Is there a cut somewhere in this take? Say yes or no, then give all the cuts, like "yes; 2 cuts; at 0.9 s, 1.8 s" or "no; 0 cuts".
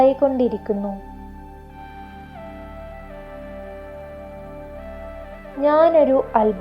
yes; 2 cuts; at 1.0 s, 5.0 s